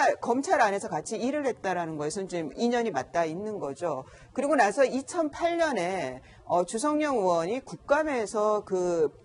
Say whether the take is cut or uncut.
uncut